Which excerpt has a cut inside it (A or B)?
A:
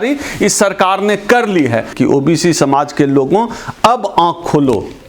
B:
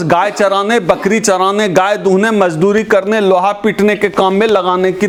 A